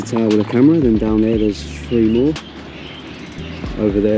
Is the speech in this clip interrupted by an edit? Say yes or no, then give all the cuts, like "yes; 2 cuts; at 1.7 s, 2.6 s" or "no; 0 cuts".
no; 0 cuts